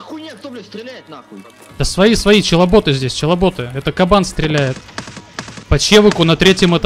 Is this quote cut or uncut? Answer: cut